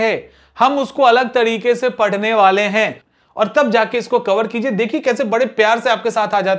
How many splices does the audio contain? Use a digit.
1